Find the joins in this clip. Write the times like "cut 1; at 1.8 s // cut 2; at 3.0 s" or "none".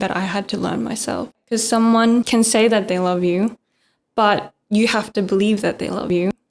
cut 1; at 1.4 s // cut 2; at 2.3 s